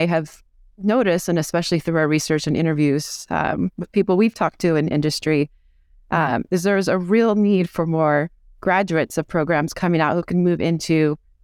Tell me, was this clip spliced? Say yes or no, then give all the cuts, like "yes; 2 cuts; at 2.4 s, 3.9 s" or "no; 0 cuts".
no; 0 cuts